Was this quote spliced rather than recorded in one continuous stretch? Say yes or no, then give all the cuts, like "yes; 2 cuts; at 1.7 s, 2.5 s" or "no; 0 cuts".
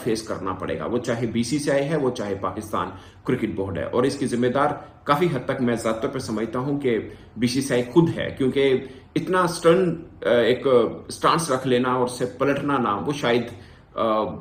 no; 0 cuts